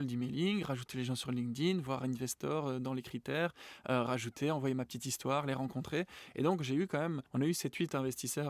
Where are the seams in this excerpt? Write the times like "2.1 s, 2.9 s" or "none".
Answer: 7.2 s